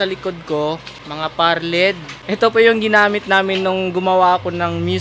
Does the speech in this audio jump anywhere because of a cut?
yes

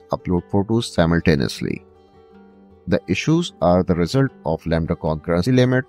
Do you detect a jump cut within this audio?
no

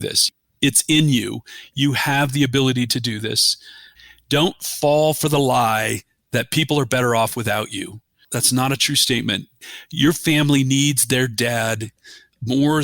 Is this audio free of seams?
no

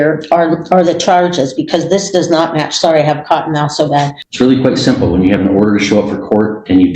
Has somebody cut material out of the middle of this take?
yes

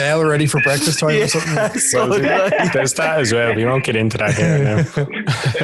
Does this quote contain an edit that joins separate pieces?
yes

